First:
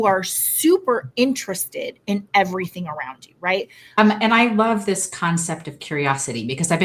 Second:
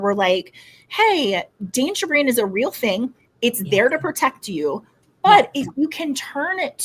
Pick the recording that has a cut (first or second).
first